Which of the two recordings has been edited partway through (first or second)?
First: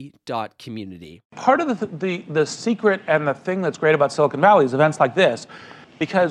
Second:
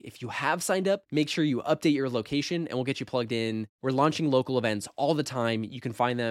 first